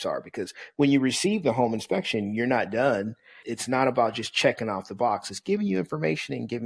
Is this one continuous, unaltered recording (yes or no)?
yes